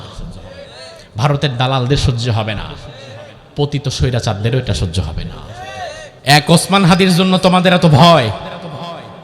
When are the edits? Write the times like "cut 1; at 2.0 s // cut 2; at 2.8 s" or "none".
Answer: cut 1; at 6.1 s